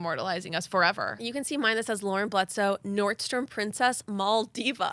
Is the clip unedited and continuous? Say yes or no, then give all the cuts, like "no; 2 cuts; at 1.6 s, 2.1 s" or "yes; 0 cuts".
yes; 0 cuts